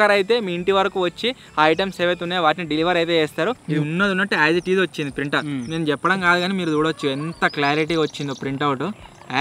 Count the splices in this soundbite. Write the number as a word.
one